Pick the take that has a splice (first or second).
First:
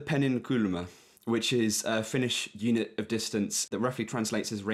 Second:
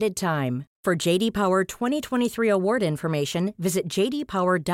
first